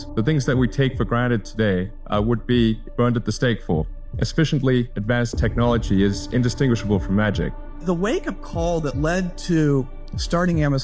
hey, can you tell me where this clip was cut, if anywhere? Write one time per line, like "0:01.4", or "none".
0:02.0
0:02.8
0:04.0
0:04.9
0:07.7